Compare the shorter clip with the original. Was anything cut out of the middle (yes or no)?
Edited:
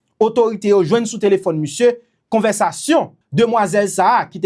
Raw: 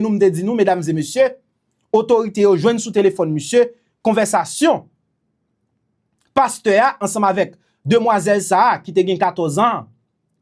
yes